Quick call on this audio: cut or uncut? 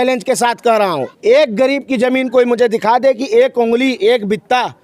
cut